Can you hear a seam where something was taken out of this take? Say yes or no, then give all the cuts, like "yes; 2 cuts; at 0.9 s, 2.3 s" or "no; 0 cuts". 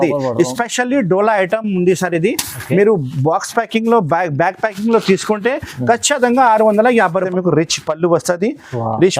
yes; 1 cut; at 7.3 s